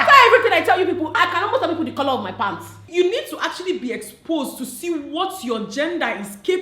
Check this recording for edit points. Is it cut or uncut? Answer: cut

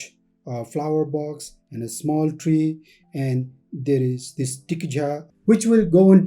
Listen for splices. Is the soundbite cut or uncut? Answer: cut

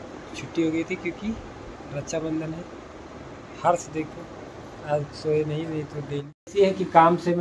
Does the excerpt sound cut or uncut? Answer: cut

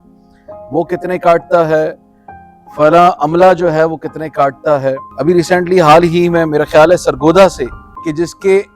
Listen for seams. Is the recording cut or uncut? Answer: cut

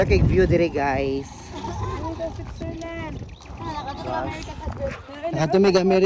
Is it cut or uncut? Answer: uncut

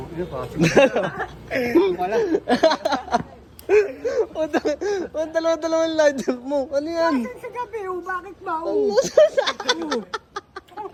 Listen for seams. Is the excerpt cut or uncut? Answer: uncut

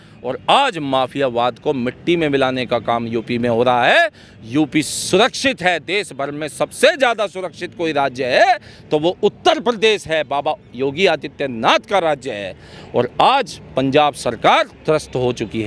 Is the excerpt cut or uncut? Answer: uncut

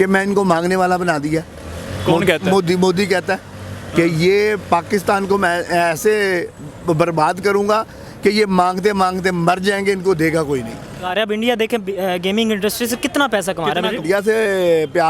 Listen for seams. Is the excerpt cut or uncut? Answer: cut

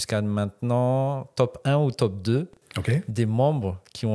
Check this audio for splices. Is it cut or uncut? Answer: uncut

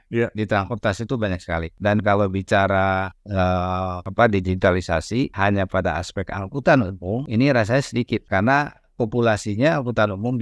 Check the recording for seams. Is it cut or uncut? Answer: cut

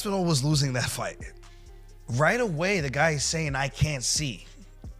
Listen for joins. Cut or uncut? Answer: cut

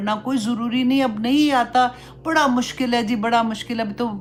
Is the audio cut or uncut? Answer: uncut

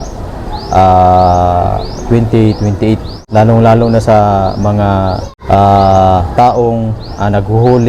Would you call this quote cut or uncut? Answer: cut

